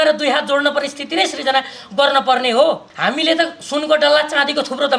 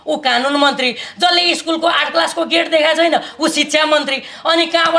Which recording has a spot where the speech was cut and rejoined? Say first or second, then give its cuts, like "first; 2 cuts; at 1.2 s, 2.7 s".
first; 1 cut; at 2.9 s